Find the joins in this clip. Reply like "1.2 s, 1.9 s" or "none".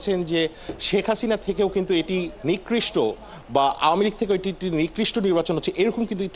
none